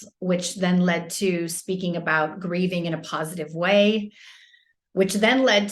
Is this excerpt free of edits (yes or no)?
yes